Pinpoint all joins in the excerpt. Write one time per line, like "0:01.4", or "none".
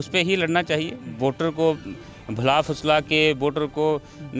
0:01.1